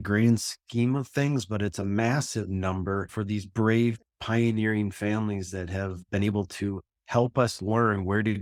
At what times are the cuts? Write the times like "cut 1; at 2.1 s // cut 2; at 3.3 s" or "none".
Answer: none